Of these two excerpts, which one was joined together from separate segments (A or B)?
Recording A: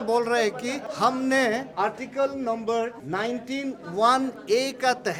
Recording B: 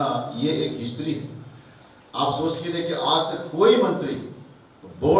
A